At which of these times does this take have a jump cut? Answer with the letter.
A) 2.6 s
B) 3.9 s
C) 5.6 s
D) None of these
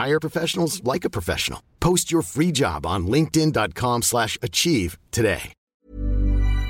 C